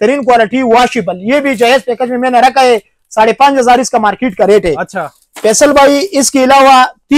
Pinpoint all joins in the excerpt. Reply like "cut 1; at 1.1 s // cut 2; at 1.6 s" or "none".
none